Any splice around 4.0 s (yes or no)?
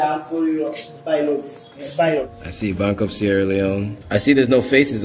yes